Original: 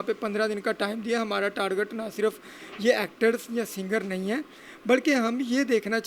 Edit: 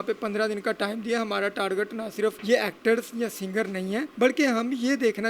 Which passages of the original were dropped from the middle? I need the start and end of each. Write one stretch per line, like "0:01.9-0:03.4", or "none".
0:02.4-0:02.7
0:04.5-0:04.8